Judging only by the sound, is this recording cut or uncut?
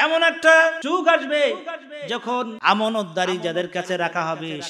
cut